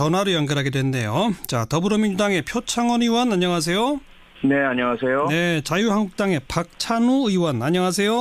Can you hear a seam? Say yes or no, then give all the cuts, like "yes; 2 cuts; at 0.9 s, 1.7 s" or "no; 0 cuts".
no; 0 cuts